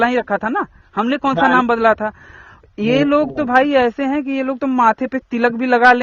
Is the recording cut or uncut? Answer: uncut